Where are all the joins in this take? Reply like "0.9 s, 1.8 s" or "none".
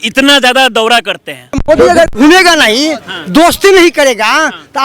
1.6 s